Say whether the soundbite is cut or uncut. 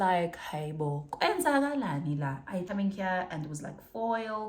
cut